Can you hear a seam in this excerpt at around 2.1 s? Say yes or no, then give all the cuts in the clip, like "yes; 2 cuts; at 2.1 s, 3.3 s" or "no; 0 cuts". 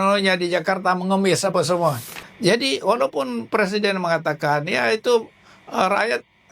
yes; 1 cut; at 2.1 s